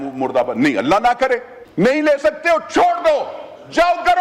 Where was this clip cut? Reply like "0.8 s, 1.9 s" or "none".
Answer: 1.6 s